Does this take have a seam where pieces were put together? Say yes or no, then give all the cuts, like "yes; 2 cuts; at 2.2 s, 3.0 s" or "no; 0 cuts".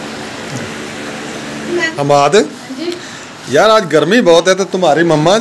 yes; 1 cut; at 1.9 s